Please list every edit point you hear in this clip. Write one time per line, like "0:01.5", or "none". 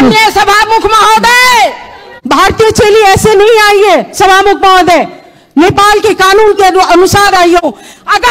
0:02.1
0:07.6